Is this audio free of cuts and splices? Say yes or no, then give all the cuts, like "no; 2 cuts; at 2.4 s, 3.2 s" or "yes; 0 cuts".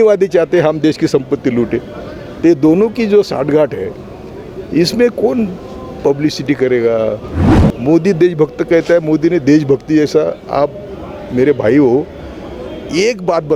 yes; 0 cuts